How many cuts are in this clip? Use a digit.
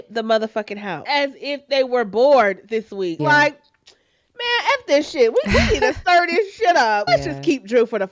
3